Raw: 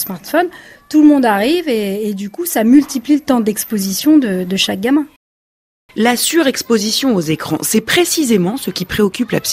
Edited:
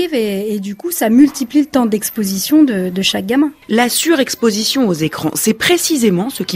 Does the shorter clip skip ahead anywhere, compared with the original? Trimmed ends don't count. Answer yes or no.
yes